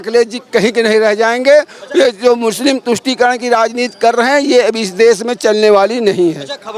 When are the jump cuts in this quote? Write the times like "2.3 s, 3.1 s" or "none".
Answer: none